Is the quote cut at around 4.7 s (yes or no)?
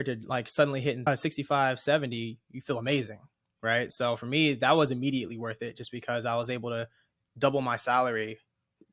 no